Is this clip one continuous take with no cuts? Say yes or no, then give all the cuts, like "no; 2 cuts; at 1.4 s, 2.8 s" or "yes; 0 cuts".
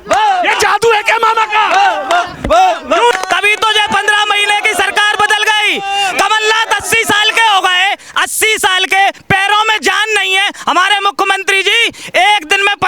no; 1 cut; at 3.1 s